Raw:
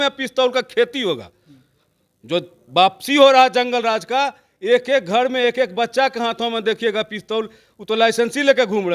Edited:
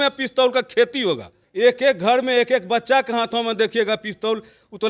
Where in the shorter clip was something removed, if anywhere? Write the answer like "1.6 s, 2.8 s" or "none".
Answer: 1.4 s